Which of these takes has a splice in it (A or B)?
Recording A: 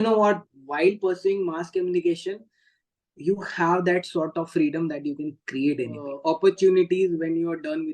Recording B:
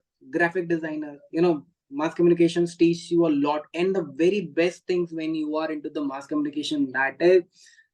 A